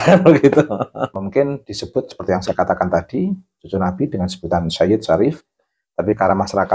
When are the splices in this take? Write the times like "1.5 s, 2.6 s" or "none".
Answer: 1.1 s